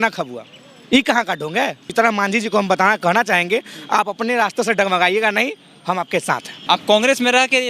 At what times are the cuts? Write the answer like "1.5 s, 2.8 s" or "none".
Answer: 1.9 s, 6.5 s